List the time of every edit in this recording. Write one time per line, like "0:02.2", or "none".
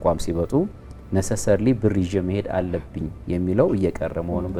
none